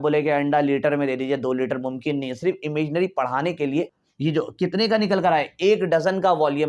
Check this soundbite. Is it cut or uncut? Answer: cut